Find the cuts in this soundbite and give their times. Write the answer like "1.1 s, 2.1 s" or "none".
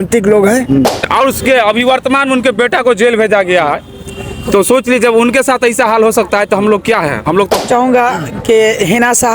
1.0 s, 7.7 s